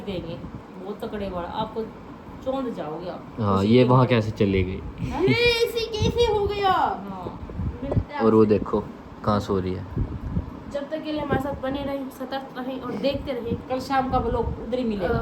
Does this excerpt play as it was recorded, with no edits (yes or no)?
yes